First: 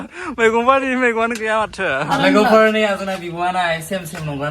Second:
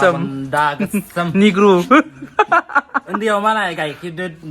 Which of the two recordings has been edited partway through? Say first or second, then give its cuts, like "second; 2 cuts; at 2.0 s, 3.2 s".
first; 1 cut; at 2.1 s